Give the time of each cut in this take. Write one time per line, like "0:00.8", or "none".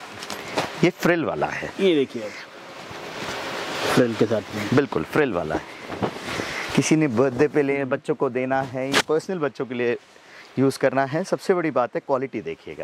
none